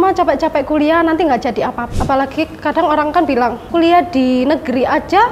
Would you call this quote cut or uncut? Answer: cut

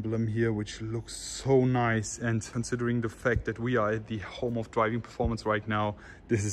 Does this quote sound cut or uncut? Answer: cut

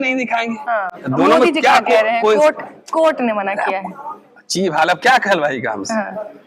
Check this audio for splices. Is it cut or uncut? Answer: uncut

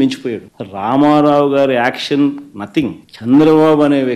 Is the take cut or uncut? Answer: uncut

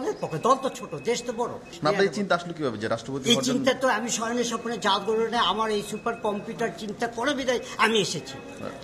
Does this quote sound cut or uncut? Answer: cut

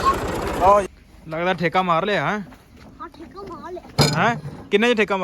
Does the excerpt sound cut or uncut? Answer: cut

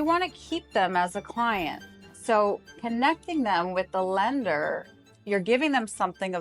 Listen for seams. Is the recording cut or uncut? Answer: uncut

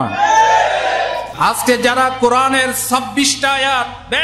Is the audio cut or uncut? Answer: cut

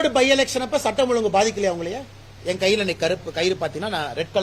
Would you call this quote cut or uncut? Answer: cut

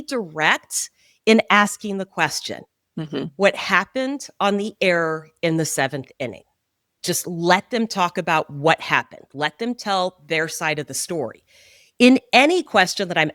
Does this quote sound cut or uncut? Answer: uncut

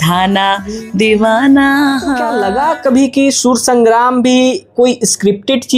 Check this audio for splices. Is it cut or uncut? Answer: cut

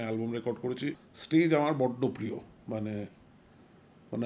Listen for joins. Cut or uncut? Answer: cut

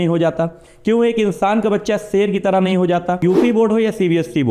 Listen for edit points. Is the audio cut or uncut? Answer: cut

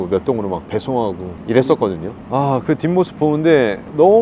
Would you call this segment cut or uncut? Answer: uncut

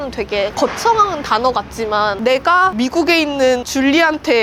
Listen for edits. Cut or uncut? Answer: uncut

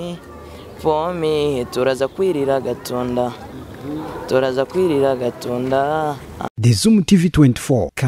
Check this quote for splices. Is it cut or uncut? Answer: cut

